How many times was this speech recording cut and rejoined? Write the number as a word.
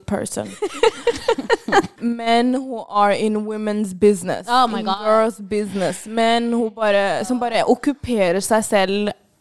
one